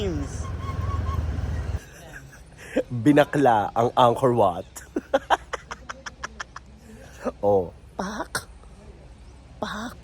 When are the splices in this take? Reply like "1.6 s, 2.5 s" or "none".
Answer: 1.7 s